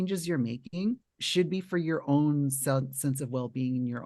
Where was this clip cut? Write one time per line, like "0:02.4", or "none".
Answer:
0:01.1